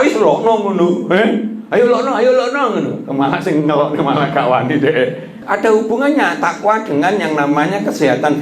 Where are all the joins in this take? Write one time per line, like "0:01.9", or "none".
0:05.3